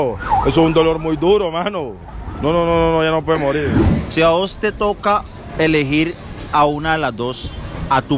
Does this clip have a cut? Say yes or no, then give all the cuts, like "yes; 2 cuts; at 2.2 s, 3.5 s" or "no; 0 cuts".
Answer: yes; 1 cut; at 3.9 s